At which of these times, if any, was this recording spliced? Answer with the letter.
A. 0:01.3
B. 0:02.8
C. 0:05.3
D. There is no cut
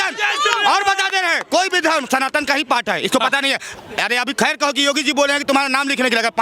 D